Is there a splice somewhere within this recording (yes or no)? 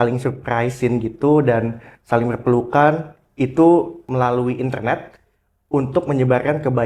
yes